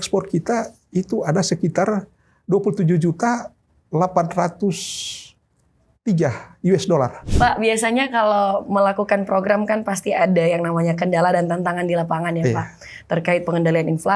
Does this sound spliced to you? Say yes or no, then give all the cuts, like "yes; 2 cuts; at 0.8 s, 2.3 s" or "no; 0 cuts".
yes; 1 cut; at 7.2 s